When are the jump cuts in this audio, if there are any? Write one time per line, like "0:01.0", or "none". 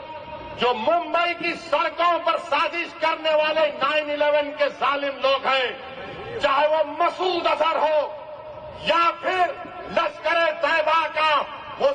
none